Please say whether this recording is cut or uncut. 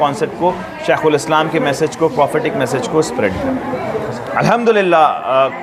uncut